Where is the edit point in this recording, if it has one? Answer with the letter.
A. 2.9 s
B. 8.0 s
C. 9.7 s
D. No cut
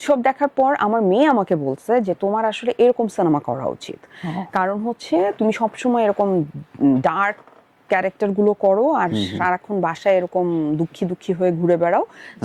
D